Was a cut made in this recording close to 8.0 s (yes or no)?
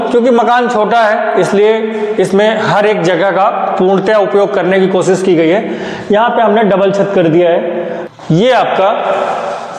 yes